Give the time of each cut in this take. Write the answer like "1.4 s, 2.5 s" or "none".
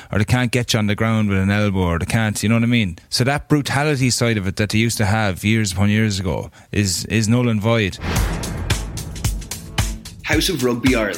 3.0 s, 8.0 s